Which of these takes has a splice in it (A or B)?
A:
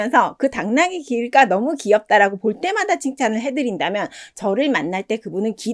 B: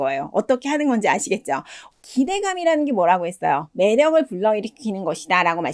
B